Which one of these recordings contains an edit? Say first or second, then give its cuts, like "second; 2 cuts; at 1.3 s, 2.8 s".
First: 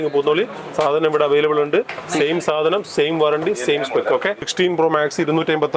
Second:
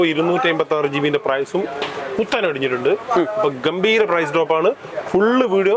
first; 1 cut; at 4.4 s